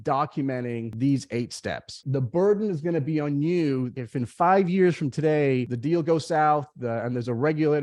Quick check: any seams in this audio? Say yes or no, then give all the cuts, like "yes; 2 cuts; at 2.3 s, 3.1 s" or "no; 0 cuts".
yes; 4 cuts; at 0.9 s, 2.0 s, 3.9 s, 5.7 s